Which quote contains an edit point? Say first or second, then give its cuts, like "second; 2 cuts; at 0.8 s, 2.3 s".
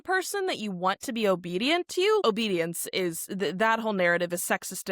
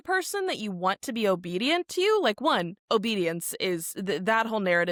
first; 1 cut; at 2.2 s